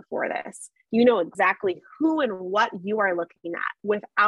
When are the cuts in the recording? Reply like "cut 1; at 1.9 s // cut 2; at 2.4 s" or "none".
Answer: cut 1; at 1.3 s